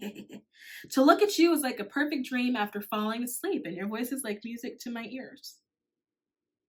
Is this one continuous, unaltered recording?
yes; 0 cuts

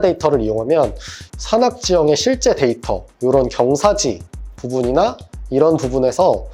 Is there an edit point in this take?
yes; 1 cut; at 1.2 s

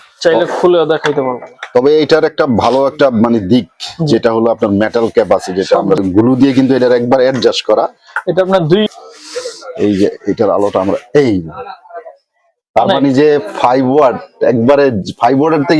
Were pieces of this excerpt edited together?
yes; 2 cuts; at 6.0 s, 8.9 s

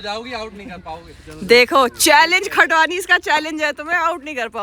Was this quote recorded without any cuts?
yes; 0 cuts

